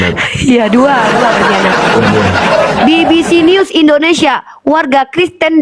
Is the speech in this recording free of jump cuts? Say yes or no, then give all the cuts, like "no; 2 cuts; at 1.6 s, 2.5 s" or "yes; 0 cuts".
yes; 0 cuts